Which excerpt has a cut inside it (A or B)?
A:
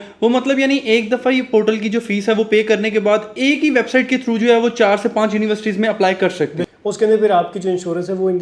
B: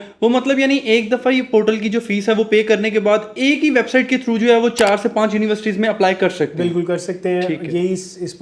A